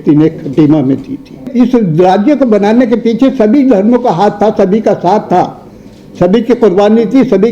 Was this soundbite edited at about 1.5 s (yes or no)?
yes